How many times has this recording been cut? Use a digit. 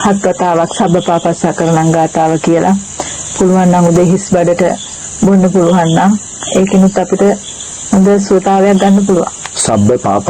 0